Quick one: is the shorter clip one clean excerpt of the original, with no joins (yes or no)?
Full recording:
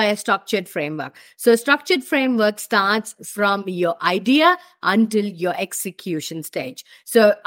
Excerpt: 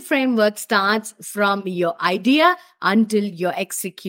yes